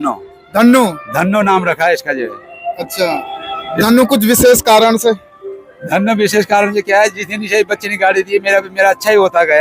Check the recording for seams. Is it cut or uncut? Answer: uncut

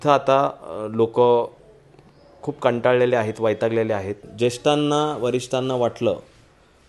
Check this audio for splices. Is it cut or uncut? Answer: cut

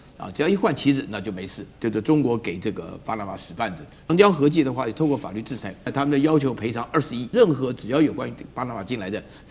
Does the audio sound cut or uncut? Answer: cut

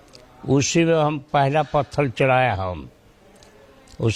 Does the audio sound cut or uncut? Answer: uncut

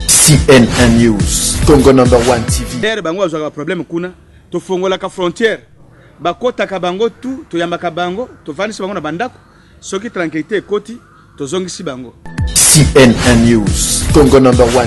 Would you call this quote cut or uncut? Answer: cut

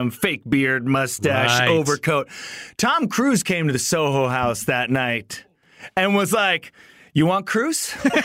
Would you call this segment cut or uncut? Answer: uncut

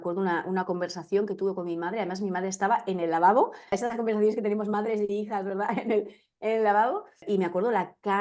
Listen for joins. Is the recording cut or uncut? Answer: cut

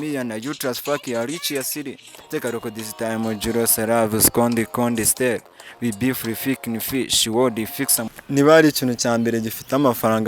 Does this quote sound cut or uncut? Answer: cut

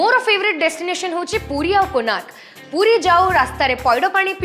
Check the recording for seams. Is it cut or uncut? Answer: uncut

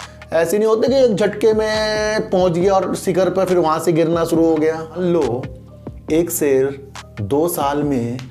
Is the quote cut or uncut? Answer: cut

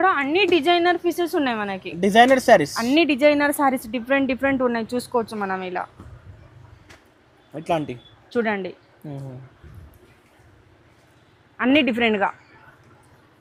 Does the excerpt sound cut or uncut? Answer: uncut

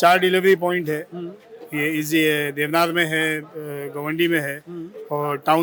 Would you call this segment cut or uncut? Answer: uncut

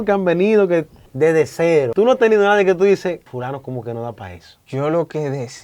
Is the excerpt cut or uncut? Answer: cut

